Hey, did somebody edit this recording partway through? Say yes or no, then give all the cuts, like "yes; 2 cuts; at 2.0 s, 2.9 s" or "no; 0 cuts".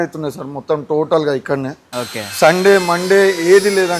no; 0 cuts